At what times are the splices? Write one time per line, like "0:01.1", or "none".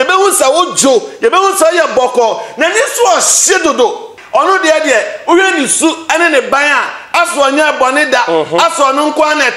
0:04.1